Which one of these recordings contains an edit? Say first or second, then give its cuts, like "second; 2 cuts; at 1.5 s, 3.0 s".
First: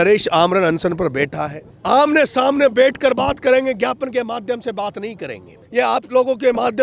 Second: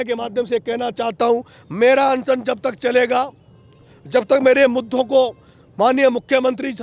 first; 2 cuts; at 1.7 s, 5.6 s